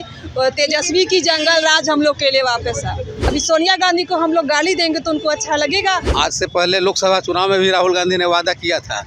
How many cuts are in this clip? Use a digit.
2